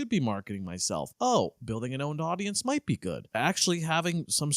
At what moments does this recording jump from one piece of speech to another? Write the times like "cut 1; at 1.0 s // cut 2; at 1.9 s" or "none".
cut 1; at 1.1 s // cut 2; at 3.3 s